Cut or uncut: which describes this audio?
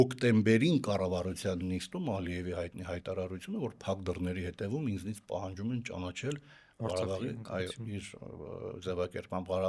uncut